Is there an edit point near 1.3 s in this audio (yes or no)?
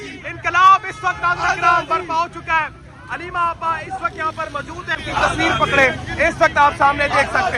no